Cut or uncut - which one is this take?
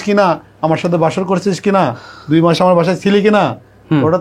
uncut